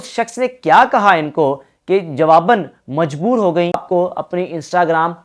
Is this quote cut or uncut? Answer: cut